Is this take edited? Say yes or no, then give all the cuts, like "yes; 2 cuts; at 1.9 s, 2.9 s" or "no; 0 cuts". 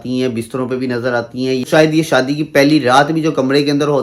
yes; 1 cut; at 1.7 s